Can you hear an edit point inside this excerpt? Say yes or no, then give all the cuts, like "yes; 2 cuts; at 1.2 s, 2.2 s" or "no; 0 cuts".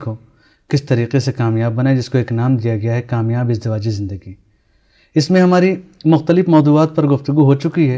yes; 1 cut; at 6.7 s